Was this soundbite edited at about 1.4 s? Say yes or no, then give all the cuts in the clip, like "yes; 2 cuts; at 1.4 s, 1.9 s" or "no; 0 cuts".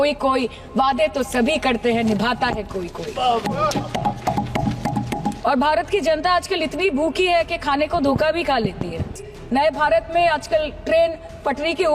no; 2 cuts; at 5.3 s, 9.3 s